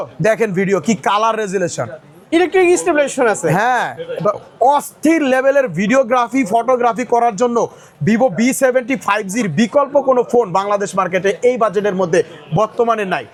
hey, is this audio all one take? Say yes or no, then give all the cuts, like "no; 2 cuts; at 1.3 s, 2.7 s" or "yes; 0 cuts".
yes; 0 cuts